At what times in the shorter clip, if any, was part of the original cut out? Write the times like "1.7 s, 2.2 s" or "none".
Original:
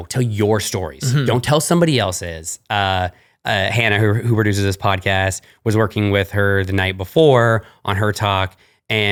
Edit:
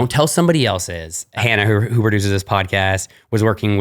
1.4 s